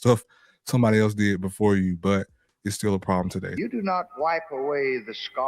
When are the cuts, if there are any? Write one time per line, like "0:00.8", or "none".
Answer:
0:03.5